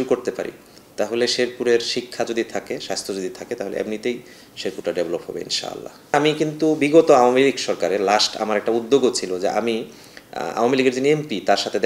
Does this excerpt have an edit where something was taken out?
yes; 1 cut; at 6.1 s

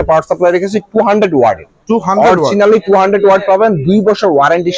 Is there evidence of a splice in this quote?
no; 0 cuts

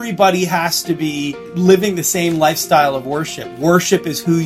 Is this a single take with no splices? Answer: yes; 0 cuts

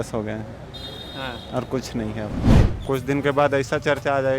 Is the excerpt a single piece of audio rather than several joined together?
no; 1 cut; at 2.5 s

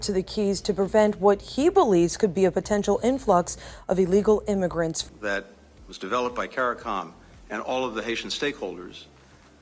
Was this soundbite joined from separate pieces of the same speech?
yes; 1 cut; at 5.0 s

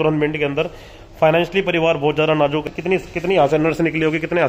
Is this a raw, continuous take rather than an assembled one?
no; 1 cut; at 2.6 s

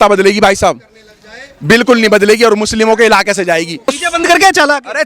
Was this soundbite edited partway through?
yes; 1 cut; at 3.9 s

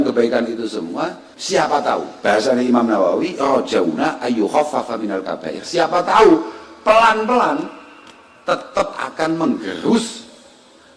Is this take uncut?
no; 1 cut; at 1.3 s

